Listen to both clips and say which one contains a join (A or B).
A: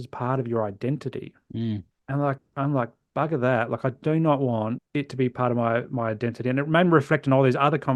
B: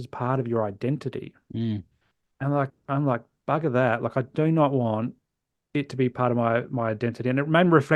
A